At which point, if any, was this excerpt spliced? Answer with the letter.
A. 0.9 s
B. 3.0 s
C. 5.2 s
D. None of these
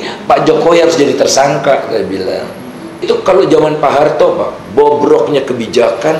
B